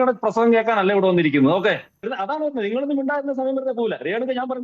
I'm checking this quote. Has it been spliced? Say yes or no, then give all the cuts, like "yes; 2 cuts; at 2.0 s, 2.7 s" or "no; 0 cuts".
yes; 1 cut; at 1.9 s